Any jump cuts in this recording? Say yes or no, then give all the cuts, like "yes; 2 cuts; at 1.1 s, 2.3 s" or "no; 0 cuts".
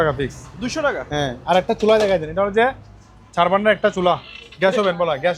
no; 0 cuts